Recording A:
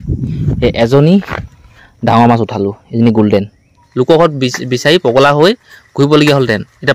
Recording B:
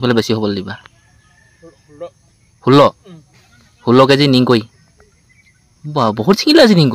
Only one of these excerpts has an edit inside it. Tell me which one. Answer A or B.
A